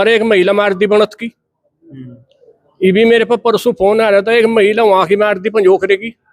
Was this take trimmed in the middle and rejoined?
no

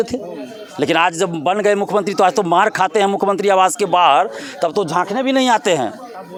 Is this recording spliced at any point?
no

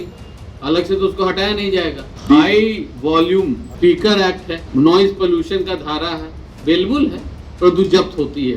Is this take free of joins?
no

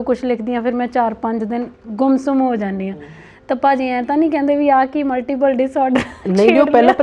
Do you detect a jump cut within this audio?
no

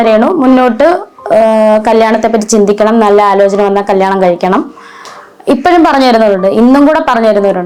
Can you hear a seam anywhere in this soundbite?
no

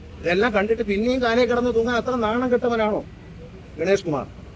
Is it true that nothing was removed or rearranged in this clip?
yes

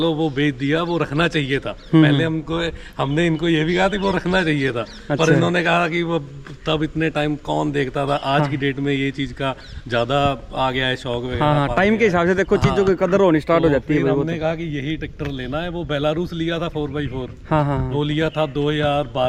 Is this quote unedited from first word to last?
yes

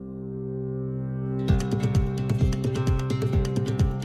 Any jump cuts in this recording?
yes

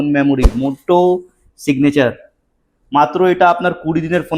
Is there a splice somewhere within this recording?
no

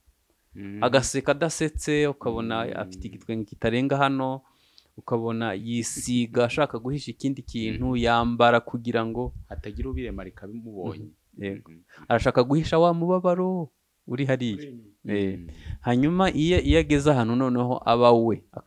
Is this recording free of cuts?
yes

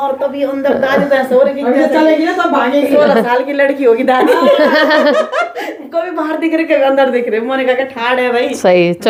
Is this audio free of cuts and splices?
yes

